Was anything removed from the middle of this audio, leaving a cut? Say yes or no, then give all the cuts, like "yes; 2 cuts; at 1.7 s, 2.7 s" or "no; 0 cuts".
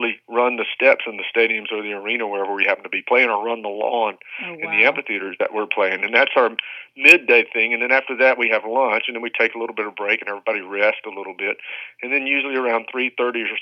no; 0 cuts